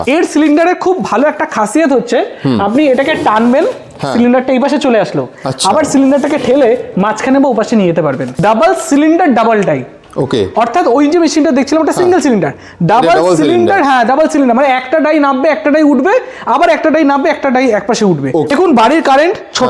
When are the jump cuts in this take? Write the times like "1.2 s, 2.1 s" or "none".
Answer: 8.3 s, 18.5 s